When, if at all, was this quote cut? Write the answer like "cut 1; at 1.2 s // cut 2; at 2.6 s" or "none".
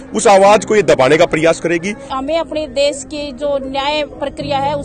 cut 1; at 2.1 s